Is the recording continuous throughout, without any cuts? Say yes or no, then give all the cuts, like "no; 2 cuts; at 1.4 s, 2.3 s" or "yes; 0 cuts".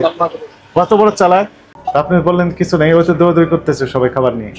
no; 1 cut; at 1.6 s